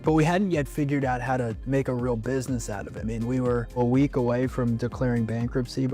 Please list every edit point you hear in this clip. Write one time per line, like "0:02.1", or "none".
0:01.6
0:02.9